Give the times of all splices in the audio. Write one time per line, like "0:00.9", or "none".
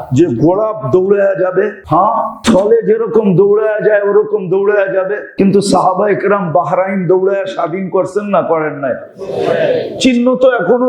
0:02.3
0:05.2